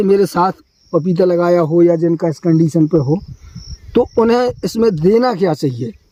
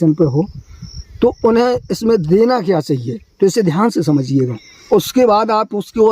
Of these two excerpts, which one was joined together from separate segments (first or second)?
second